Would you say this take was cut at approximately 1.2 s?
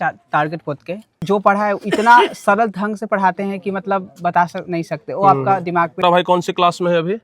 yes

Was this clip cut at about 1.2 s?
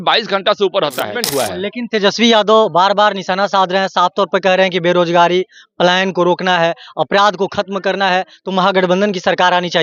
yes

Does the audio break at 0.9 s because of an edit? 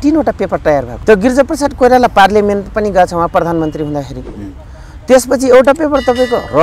yes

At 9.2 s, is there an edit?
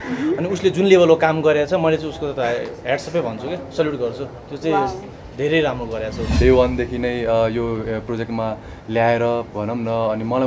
no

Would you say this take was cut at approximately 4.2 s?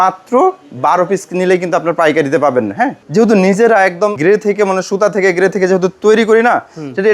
yes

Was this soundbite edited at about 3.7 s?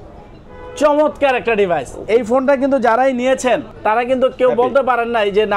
yes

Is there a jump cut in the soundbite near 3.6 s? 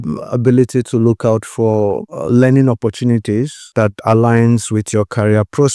yes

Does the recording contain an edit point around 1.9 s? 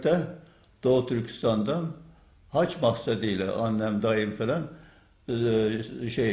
no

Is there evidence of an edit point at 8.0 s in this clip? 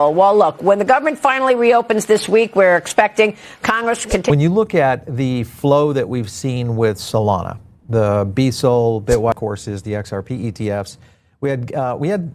no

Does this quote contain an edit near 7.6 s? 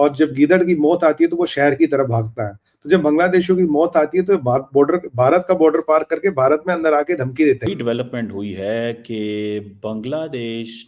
yes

